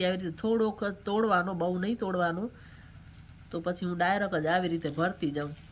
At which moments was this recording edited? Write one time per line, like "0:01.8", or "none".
none